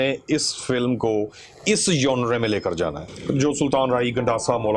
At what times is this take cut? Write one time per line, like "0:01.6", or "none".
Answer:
0:03.1